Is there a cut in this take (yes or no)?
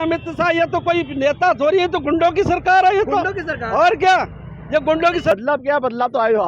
yes